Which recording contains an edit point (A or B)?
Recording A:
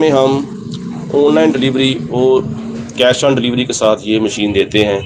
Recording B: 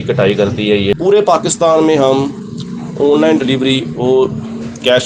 B